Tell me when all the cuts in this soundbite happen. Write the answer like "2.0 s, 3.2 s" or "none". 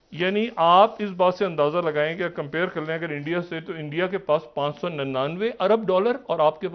none